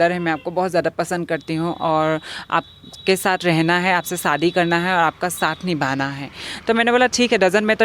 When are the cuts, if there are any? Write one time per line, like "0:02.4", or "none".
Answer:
none